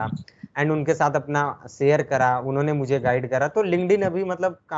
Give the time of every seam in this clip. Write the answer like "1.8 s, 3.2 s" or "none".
none